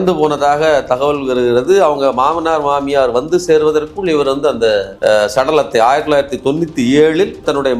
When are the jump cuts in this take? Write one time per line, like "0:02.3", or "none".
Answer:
none